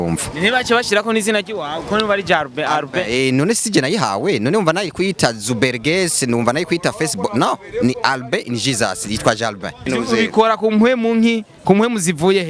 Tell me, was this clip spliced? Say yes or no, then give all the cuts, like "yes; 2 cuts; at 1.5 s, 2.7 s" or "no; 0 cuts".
yes; 1 cut; at 9.9 s